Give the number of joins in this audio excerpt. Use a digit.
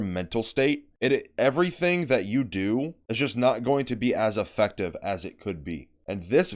0